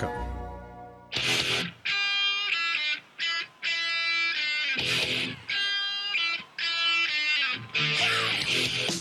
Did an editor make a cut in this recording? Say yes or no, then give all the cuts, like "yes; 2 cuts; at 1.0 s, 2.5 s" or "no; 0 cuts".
yes; 1 cut; at 1.1 s